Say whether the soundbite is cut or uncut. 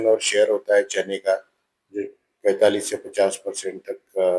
uncut